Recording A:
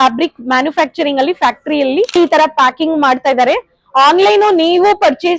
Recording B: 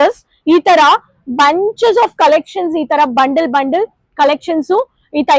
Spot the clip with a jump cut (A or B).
A